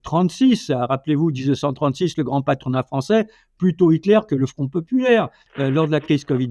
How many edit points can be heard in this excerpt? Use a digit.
1